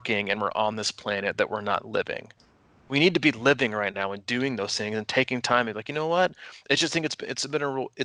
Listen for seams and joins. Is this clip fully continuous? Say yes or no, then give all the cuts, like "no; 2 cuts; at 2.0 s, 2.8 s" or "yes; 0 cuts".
yes; 0 cuts